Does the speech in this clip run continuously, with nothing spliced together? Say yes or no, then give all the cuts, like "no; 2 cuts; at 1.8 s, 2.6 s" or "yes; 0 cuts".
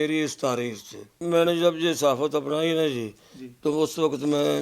no; 1 cut; at 1.2 s